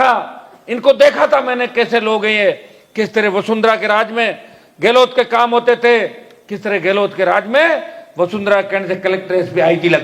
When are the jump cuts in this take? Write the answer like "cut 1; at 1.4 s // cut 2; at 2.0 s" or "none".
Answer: none

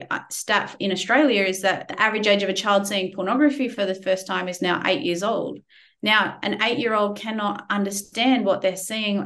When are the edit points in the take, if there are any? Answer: cut 1; at 1.9 s

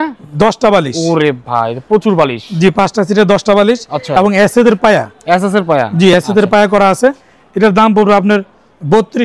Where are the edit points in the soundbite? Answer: none

